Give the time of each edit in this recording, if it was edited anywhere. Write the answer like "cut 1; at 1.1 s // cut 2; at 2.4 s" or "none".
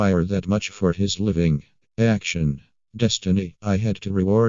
cut 1; at 1.8 s